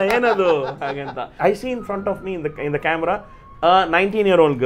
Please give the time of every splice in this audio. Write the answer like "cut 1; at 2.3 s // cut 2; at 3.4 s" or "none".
cut 1; at 1.2 s